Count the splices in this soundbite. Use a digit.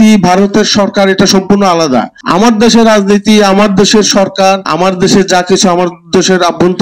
2